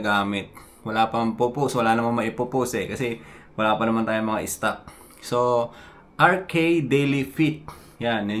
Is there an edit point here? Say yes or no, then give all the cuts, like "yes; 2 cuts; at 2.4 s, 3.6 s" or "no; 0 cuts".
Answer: no; 0 cuts